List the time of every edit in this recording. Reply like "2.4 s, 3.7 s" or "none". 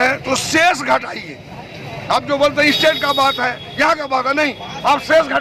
none